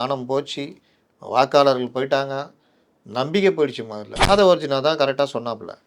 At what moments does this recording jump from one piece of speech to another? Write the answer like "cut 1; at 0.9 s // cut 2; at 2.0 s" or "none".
cut 1; at 4.3 s